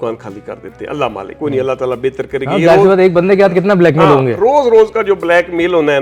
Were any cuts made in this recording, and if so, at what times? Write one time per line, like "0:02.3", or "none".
0:01.3